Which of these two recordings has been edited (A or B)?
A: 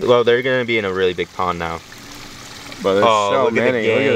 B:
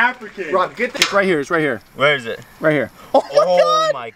B